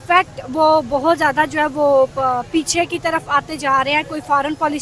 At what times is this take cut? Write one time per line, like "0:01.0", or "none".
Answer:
none